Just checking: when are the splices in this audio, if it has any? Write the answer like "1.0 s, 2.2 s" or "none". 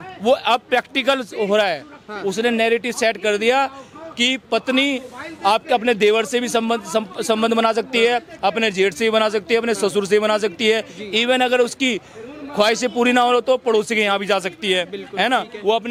none